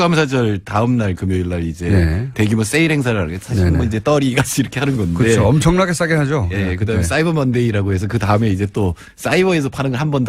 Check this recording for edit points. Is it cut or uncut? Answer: cut